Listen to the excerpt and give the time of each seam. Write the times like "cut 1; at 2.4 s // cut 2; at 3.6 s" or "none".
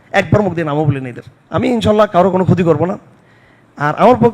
cut 1; at 1.6 s